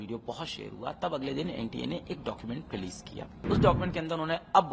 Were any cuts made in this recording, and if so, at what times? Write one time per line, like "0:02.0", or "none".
0:03.4